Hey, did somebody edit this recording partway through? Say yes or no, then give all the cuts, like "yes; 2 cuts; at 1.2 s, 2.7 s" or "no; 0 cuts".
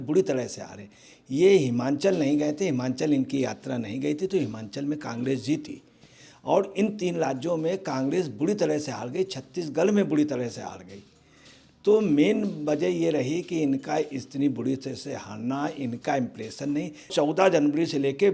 yes; 1 cut; at 17.1 s